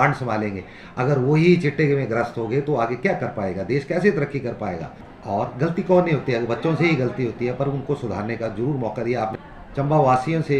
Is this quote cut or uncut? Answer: cut